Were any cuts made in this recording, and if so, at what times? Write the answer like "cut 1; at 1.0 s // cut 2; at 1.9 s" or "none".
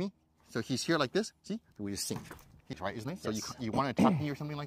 cut 1; at 2.8 s